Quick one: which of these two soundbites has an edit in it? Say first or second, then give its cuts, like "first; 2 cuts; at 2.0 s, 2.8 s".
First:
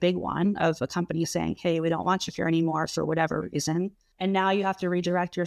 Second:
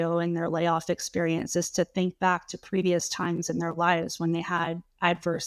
first; 1 cut; at 4.0 s